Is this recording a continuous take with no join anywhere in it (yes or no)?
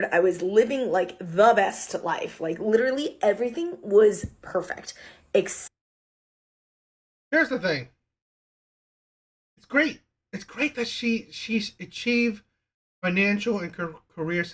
yes